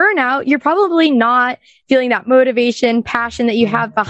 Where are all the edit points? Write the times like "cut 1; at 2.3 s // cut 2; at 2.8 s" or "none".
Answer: none